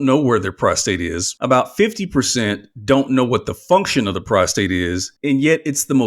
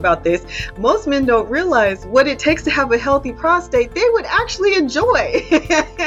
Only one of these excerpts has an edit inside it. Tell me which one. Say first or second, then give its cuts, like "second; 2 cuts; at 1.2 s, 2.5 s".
first; 2 cuts; at 1.3 s, 5.1 s